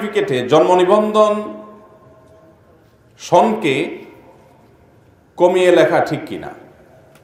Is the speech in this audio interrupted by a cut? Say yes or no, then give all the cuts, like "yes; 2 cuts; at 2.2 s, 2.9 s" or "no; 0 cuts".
no; 0 cuts